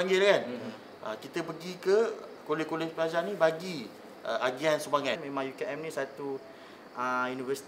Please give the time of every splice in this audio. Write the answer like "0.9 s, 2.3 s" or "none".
5.2 s